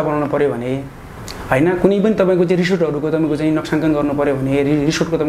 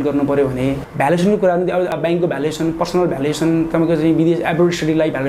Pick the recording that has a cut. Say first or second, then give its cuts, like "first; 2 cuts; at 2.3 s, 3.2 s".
second; 2 cuts; at 0.9 s, 1.9 s